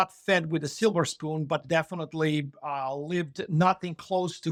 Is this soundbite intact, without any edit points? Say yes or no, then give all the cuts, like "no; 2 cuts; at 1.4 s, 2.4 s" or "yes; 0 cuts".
yes; 0 cuts